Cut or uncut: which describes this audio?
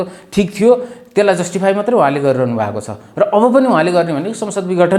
uncut